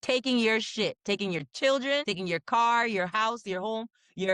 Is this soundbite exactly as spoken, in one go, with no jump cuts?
no; 1 cut; at 2.1 s

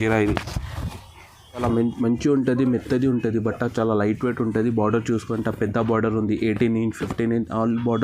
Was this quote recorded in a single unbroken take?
no; 1 cut; at 1.6 s

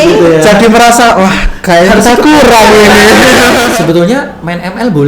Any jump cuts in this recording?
yes; 1 cut; at 3.7 s

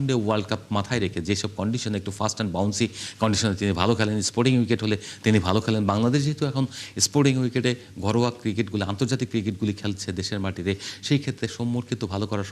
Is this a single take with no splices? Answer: yes; 0 cuts

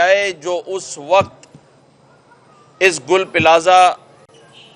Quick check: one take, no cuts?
yes; 0 cuts

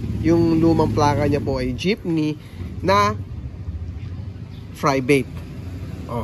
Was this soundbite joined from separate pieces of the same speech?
no; 0 cuts

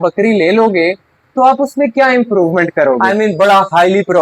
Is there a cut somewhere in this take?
yes; 1 cut; at 3.0 s

